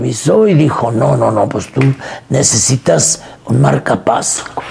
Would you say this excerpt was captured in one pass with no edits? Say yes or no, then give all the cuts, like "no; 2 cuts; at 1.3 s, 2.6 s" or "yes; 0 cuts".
yes; 0 cuts